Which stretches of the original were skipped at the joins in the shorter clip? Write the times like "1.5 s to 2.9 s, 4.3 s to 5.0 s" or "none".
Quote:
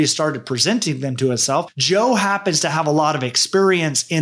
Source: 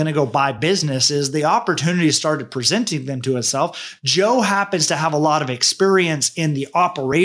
3.8 s to 4.0 s